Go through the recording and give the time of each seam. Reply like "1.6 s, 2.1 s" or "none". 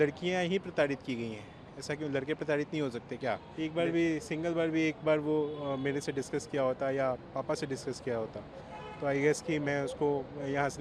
3.5 s